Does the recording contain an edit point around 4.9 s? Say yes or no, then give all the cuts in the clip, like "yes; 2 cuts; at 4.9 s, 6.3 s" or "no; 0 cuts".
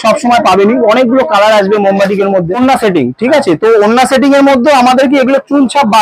no; 1 cut; at 2.5 s